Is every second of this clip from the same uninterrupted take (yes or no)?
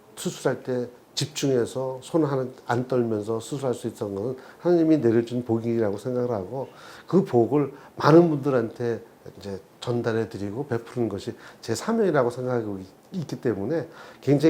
yes